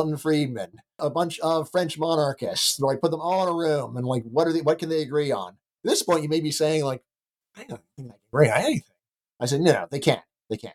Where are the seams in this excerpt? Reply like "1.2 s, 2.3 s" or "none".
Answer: 1.0 s, 5.7 s